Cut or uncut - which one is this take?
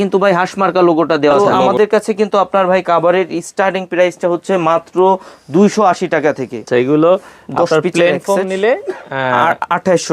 cut